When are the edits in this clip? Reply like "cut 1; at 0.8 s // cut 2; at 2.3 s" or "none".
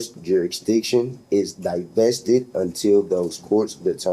none